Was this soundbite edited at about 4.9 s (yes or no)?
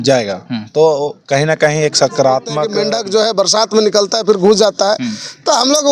no